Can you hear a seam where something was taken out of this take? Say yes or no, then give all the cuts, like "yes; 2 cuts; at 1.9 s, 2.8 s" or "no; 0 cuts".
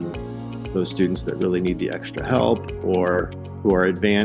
no; 0 cuts